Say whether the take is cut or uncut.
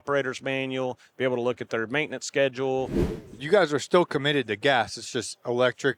cut